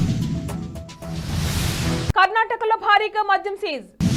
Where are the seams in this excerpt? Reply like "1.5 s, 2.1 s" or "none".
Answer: none